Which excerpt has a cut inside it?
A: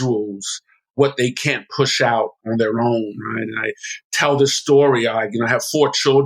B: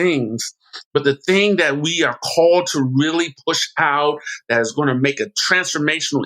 A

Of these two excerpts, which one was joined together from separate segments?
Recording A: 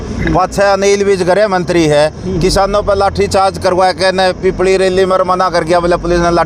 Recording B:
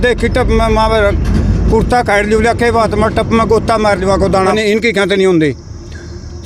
B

